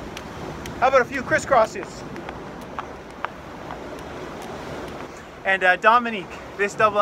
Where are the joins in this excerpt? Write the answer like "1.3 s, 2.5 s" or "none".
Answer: 5.0 s